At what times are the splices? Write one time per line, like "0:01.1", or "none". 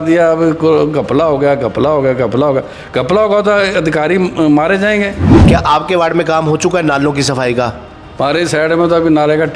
0:05.3